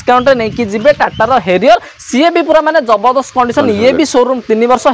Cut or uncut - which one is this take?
uncut